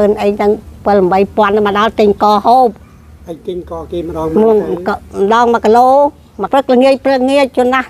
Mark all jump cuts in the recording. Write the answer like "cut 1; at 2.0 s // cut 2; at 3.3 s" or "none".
cut 1; at 6.5 s